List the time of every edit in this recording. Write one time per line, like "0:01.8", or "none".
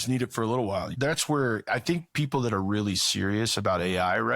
0:00.9